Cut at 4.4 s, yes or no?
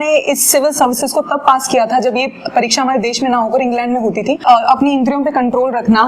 yes